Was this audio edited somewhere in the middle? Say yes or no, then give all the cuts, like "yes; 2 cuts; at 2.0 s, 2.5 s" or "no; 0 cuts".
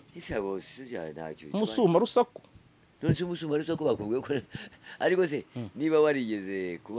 no; 0 cuts